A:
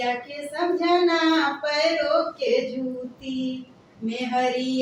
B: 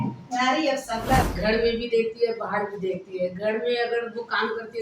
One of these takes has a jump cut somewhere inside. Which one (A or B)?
B